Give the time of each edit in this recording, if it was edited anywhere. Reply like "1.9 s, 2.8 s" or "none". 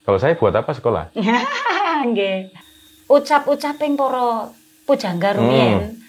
2.6 s